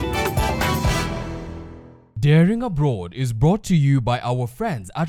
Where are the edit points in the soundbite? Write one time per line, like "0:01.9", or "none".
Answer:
none